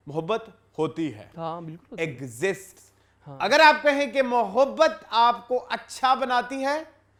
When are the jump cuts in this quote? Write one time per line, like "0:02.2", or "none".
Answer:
none